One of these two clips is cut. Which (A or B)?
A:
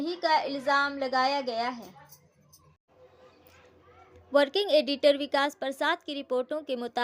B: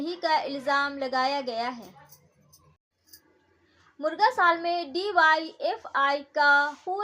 B